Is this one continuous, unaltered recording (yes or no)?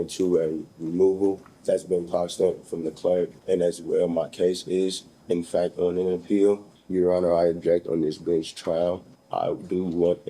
no